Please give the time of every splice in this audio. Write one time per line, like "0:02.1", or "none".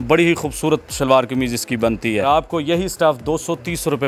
0:02.3